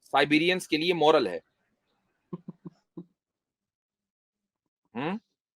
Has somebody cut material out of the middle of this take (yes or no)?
no